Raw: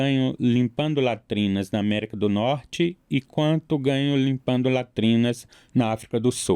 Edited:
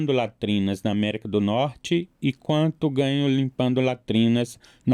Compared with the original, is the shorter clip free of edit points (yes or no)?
yes